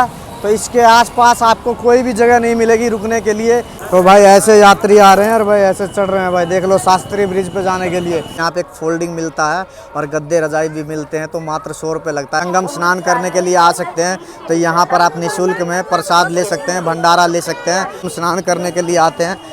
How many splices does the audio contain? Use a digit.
4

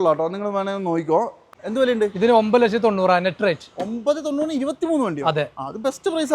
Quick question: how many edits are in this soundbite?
1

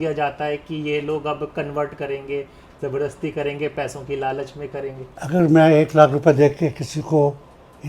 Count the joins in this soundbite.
1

